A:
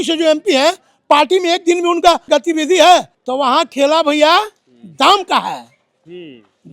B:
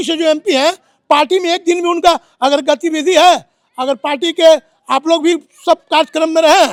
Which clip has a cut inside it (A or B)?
A